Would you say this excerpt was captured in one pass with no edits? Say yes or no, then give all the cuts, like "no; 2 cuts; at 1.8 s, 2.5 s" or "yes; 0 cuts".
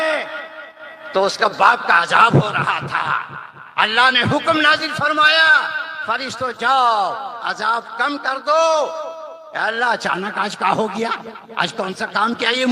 yes; 0 cuts